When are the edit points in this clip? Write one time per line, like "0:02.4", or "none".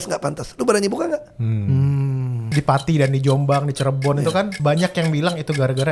0:02.5
0:04.5